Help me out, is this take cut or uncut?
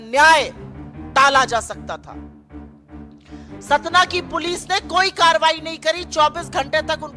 cut